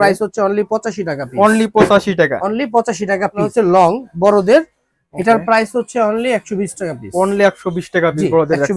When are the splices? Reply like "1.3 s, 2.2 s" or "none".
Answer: 3.5 s